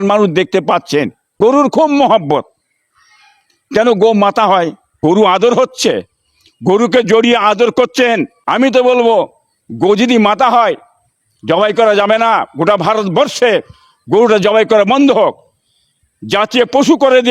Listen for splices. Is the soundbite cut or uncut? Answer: cut